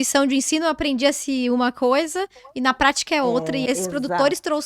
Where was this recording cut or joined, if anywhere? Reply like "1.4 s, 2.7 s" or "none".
3.6 s